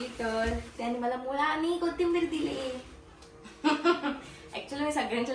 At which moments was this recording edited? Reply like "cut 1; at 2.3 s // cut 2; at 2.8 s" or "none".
none